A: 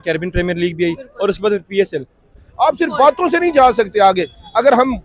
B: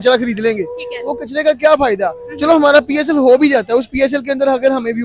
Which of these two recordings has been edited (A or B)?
A